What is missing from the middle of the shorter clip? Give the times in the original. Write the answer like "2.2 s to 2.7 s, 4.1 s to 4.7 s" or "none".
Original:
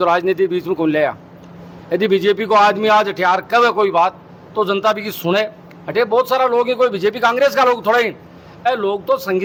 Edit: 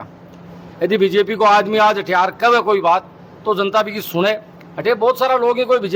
none